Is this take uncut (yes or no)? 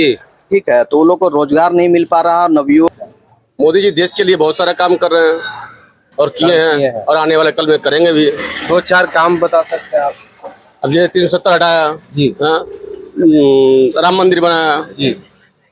no